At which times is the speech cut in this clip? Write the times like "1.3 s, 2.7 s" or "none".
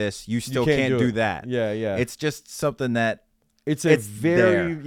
none